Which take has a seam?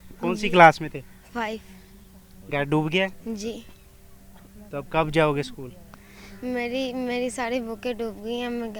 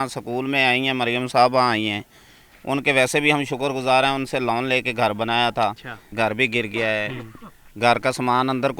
second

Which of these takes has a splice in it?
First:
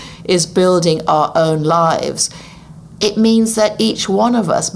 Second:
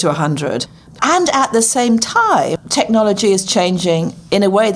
second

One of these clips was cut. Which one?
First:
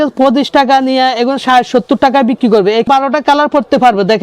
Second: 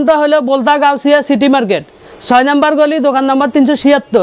first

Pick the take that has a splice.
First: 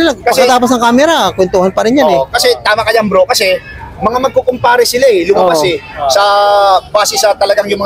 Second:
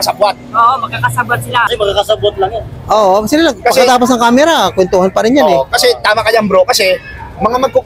second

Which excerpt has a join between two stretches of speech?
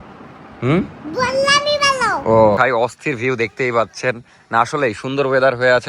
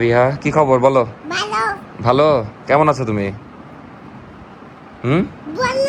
first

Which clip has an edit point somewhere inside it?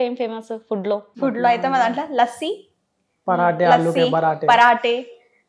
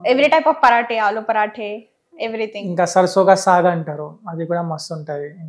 first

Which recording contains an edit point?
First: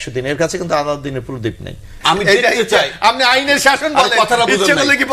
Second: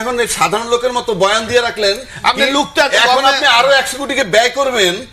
first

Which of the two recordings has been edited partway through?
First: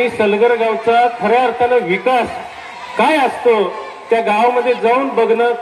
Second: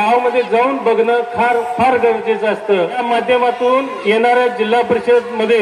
second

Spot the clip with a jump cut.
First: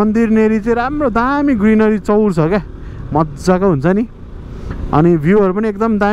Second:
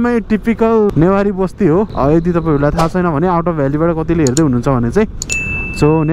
second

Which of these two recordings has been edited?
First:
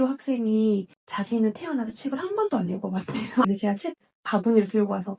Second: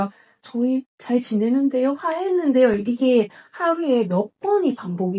first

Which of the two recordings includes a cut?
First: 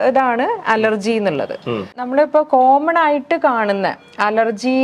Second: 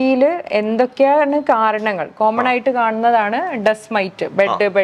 first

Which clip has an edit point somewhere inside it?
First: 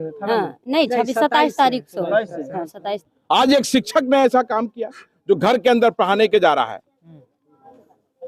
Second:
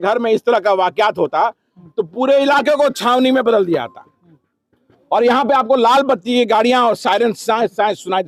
first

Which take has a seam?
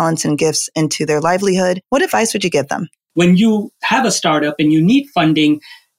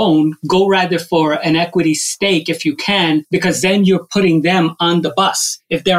first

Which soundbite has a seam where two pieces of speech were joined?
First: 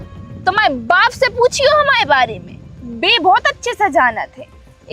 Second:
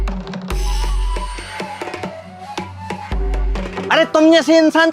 second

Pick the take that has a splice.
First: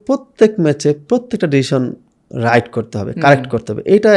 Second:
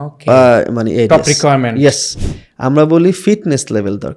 second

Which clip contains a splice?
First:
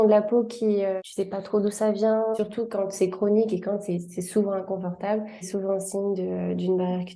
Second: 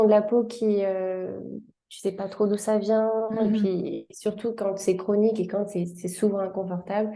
first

